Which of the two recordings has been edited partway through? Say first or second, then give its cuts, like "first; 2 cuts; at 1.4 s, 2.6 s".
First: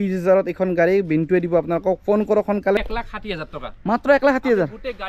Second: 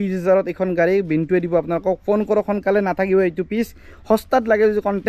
first; 1 cut; at 2.8 s